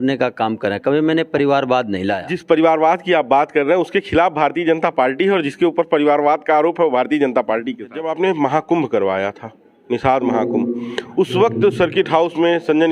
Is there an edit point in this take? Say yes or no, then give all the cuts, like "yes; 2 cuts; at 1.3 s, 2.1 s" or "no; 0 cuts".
yes; 2 cuts; at 2.3 s, 8.0 s